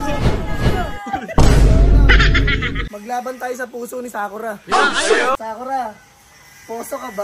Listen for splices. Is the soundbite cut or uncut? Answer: cut